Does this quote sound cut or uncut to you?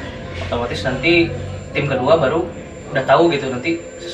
uncut